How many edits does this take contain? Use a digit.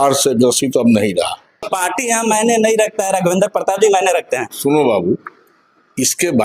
1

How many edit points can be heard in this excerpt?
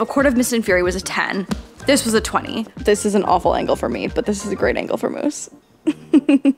1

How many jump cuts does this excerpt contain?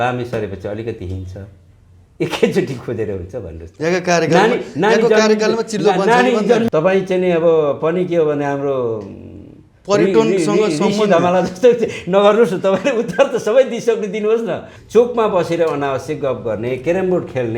2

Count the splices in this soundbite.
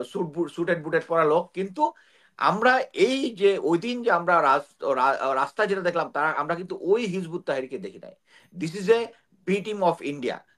0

